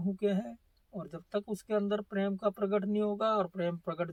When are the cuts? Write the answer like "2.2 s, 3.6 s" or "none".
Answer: none